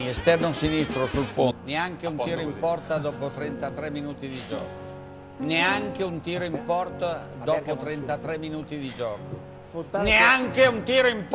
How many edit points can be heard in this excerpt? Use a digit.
0